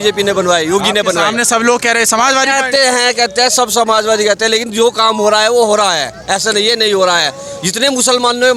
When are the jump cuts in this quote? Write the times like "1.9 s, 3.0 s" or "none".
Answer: none